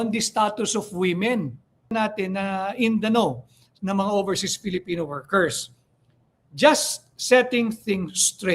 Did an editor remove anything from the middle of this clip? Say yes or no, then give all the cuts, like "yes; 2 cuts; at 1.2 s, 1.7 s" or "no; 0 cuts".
yes; 1 cut; at 1.9 s